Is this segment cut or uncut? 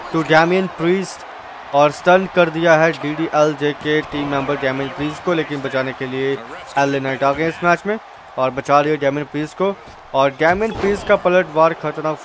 uncut